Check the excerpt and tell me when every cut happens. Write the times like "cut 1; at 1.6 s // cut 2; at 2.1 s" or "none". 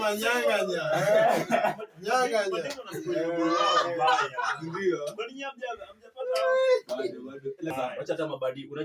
cut 1; at 7.7 s